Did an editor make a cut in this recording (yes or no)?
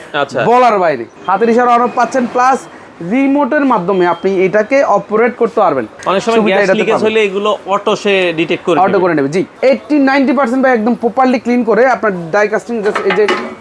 yes